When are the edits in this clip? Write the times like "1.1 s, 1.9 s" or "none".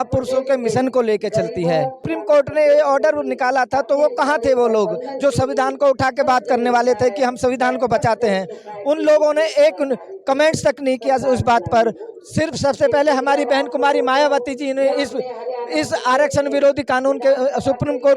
2.1 s